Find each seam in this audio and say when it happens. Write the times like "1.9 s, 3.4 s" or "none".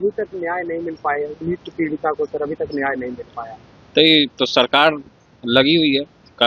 none